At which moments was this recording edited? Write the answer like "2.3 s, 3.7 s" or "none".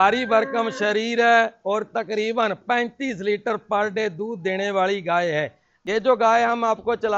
5.7 s